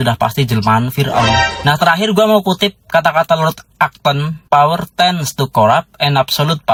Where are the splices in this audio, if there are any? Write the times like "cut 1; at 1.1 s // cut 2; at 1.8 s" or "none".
none